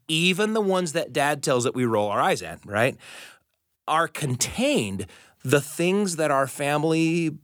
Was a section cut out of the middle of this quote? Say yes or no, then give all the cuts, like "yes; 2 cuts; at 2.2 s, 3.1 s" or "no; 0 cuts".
no; 0 cuts